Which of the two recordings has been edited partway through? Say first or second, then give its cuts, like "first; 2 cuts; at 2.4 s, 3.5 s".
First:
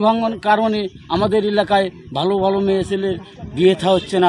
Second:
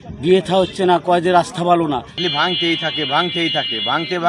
second; 1 cut; at 2.1 s